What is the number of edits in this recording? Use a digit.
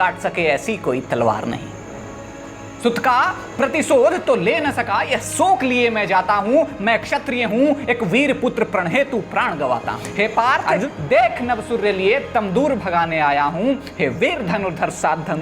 2